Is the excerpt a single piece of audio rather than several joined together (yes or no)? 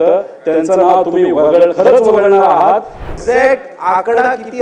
no